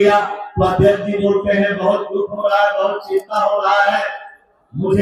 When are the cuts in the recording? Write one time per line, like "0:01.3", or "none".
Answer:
none